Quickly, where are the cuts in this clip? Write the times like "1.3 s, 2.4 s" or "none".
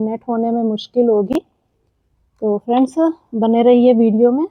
none